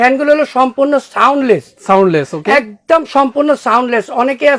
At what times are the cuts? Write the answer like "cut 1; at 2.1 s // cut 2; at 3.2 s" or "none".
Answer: none